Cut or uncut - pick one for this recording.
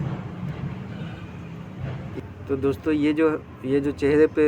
cut